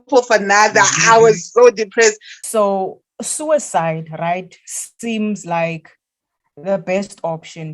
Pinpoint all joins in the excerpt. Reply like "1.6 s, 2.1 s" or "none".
2.3 s